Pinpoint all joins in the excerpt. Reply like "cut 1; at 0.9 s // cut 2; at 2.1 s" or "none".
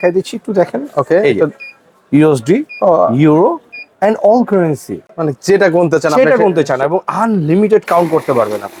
none